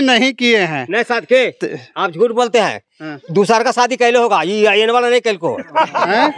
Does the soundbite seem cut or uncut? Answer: uncut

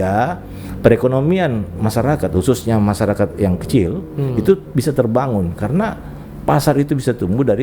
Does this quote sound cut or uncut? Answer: uncut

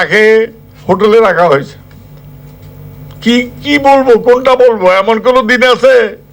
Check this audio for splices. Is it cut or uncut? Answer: uncut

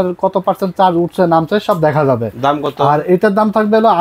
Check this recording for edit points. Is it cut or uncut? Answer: uncut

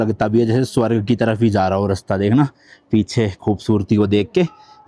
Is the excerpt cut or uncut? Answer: uncut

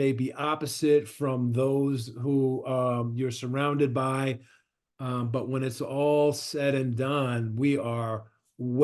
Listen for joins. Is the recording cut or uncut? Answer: uncut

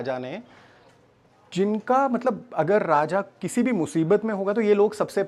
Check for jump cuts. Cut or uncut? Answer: uncut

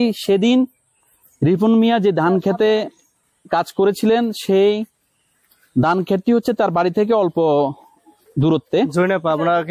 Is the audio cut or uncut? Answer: uncut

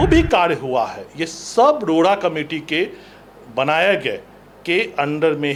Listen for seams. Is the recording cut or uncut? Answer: uncut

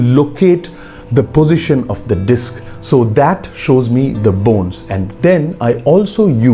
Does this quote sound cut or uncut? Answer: uncut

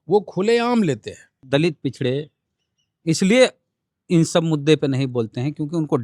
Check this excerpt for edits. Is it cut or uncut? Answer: cut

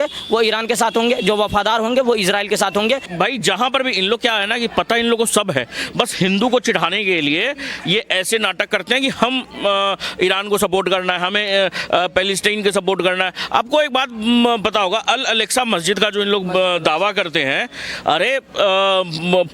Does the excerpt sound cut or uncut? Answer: cut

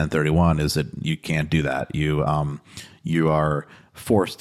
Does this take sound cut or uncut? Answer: uncut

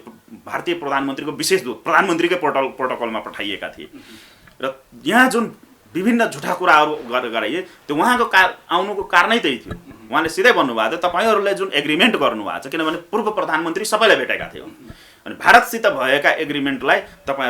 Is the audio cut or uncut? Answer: uncut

